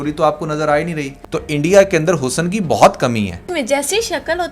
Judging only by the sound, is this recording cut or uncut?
cut